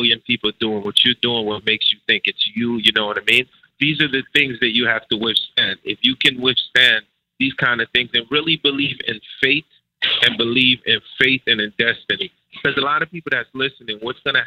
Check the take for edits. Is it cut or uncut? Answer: cut